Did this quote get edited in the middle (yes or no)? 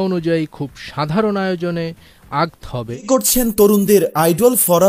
yes